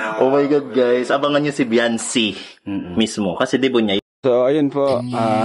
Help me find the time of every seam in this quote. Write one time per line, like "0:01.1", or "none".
0:04.0

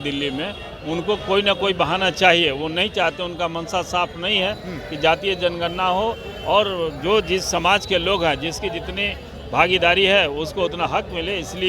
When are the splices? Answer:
none

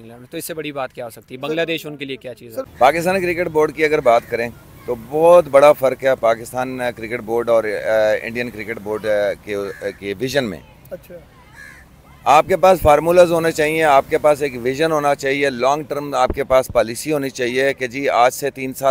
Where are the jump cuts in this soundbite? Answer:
0:02.7

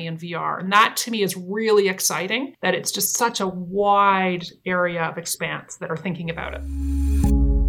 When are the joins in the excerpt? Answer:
0:02.5
0:06.6

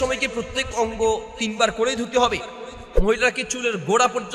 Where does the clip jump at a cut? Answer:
0:02.9

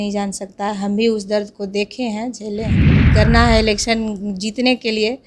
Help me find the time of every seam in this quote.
0:02.7

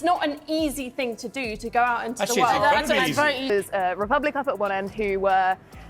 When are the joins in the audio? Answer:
0:03.4

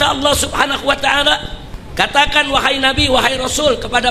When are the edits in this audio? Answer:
0:01.6

